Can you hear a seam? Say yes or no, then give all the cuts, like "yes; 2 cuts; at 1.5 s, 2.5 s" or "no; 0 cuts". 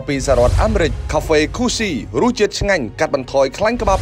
yes; 1 cut; at 1.0 s